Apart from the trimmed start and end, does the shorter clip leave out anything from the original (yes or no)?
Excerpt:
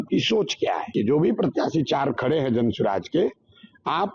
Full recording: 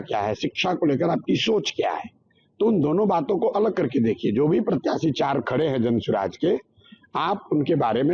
yes